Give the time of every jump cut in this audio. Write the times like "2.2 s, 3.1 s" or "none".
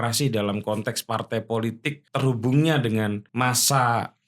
2.0 s, 3.3 s